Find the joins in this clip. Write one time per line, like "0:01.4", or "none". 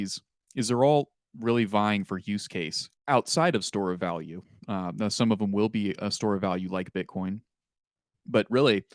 none